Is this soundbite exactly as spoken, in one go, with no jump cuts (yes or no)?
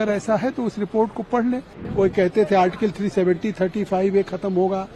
no